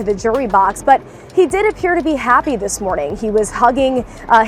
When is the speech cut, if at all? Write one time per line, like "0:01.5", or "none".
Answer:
none